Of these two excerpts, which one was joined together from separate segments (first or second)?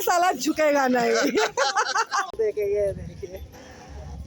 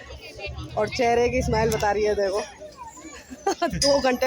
first